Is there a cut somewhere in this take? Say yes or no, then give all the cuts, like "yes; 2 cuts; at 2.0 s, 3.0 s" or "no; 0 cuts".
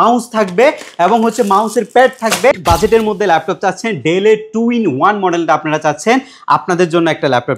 yes; 1 cut; at 2.5 s